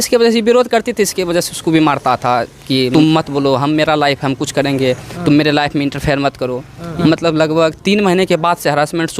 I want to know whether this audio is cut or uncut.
cut